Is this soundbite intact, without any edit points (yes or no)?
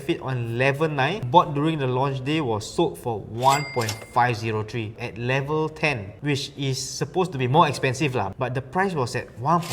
no